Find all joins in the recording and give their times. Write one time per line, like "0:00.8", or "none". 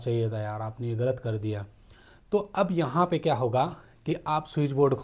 none